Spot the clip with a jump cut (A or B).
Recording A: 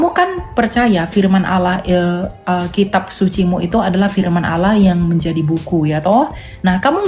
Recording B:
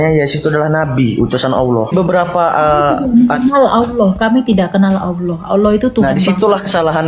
B